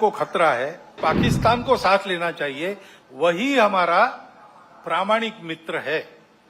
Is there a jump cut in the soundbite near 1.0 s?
yes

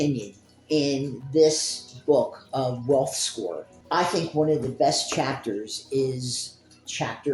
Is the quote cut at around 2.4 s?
no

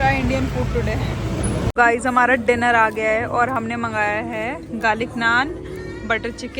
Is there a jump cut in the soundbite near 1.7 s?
yes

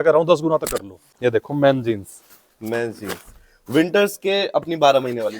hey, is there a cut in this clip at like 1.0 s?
yes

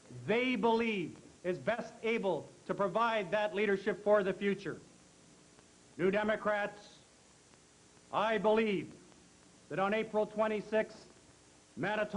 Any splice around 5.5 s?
yes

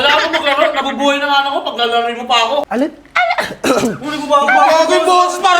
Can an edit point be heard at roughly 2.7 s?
yes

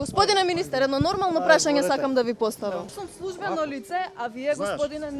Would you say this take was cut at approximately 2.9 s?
yes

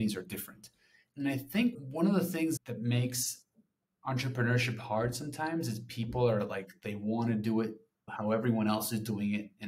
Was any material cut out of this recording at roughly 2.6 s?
yes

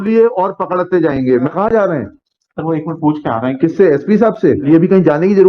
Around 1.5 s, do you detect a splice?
yes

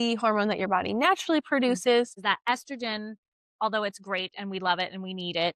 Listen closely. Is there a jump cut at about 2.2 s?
yes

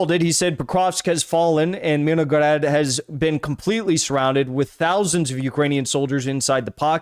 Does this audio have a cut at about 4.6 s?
no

